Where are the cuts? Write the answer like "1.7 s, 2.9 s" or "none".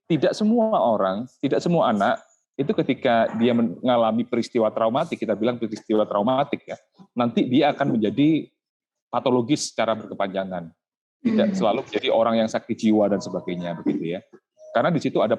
none